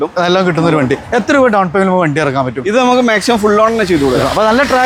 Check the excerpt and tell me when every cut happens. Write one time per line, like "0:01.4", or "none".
none

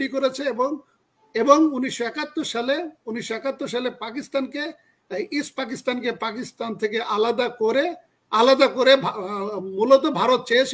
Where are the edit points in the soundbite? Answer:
none

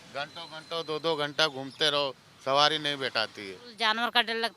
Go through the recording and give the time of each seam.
0:03.6

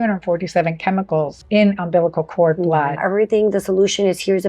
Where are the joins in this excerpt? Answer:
0:01.4
0:03.0

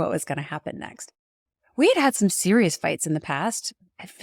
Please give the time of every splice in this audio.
none

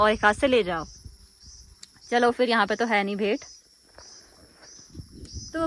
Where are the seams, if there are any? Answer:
none

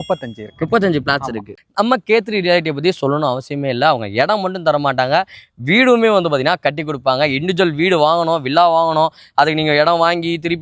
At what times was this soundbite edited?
0:01.5

